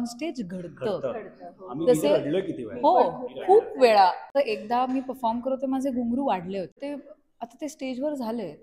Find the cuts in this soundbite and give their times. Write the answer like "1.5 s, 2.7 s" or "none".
4.3 s, 6.8 s